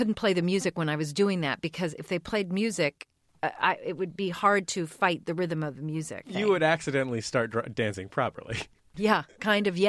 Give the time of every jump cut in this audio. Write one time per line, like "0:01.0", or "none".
0:03.2
0:06.3
0:08.9